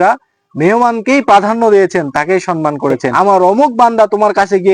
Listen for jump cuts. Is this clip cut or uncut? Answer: cut